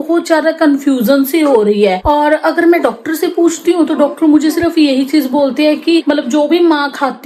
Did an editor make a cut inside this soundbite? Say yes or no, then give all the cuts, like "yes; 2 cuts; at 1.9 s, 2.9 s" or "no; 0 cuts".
no; 0 cuts